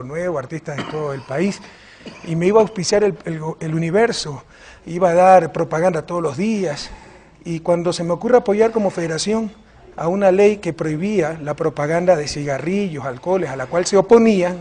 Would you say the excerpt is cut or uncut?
uncut